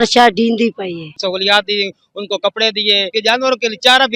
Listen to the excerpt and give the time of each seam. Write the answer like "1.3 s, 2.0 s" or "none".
1.2 s, 3.1 s